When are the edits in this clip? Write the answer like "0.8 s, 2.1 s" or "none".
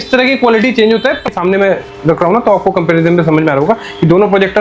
1.2 s